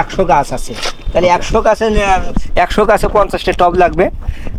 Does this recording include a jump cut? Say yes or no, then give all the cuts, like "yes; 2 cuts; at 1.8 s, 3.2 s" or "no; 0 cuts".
no; 0 cuts